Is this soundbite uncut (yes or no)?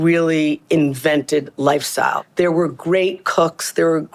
no